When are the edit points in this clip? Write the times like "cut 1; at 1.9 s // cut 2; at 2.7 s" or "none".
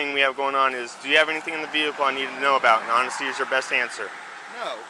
none